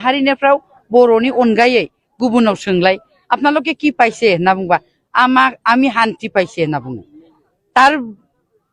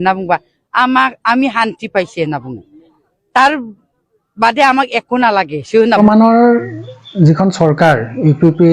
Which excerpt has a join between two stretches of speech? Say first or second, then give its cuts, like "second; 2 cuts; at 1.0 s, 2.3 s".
second; 1 cut; at 6.0 s